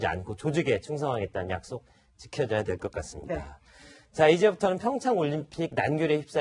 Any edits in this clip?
yes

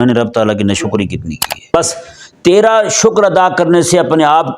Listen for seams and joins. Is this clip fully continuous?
no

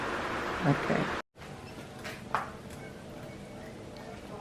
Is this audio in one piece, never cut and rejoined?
no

